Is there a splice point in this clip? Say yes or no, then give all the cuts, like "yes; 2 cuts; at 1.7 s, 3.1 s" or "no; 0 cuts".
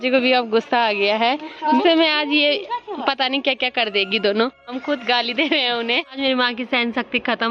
yes; 3 cuts; at 1.8 s, 4.7 s, 6.1 s